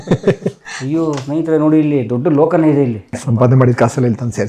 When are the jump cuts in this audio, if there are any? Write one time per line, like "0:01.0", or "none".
0:03.2